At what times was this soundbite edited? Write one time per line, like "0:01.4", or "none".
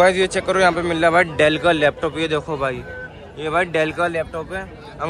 none